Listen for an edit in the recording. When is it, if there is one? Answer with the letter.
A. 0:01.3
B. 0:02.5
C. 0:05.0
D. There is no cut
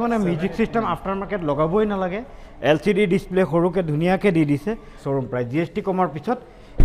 C